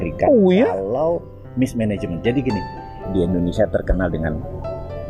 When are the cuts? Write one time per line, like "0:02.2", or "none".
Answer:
0:02.9